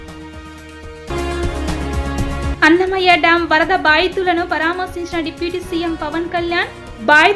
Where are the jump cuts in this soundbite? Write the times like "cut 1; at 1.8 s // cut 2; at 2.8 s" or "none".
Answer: none